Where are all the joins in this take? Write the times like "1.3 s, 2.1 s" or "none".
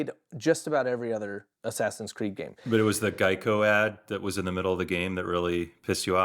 1.5 s, 2.7 s